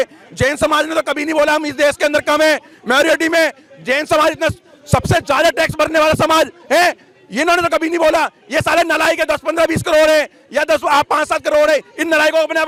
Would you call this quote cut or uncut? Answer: uncut